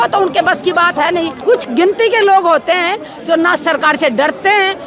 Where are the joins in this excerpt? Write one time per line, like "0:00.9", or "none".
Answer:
0:01.4